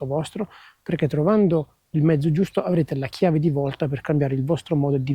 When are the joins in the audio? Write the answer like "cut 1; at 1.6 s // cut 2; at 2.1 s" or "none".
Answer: none